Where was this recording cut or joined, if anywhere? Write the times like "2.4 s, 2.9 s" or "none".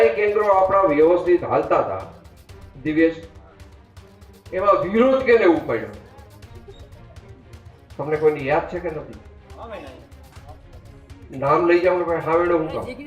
none